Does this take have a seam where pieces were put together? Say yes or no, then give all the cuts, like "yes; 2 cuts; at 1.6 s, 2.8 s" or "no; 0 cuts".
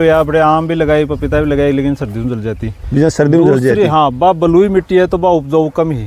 no; 0 cuts